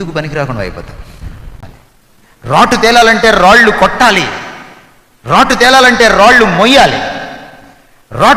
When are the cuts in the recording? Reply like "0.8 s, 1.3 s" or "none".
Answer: 1.6 s